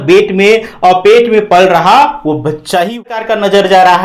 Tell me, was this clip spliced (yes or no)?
yes